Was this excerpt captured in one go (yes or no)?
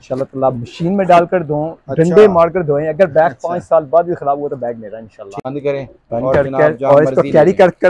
no